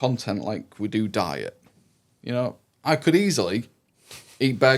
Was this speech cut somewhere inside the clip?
no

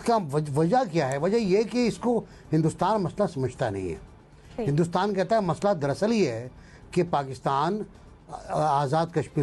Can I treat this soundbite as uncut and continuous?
yes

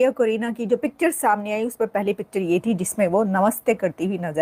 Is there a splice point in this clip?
no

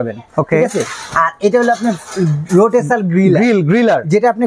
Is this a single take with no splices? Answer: yes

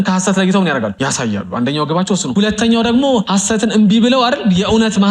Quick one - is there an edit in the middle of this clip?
yes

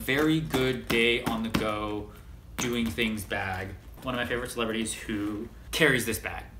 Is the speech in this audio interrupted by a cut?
yes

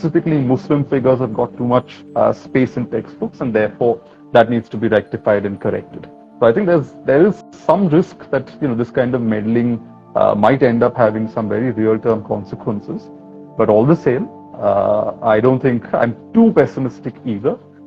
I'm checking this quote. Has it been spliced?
no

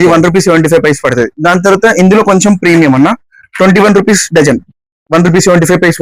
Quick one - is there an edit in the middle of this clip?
yes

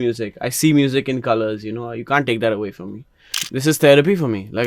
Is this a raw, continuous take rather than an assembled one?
no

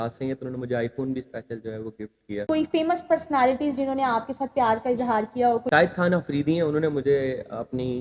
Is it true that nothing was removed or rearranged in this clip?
no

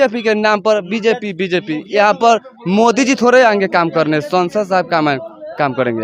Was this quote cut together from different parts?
no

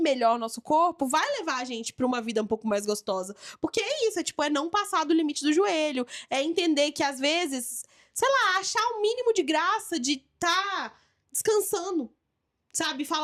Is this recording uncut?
yes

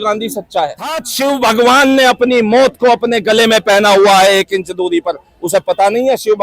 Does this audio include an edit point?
yes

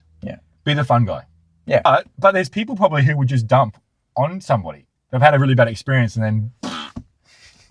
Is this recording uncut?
no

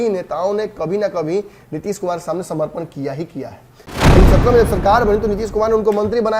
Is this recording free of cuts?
no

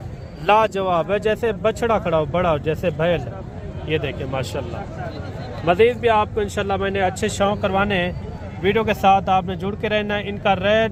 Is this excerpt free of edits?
yes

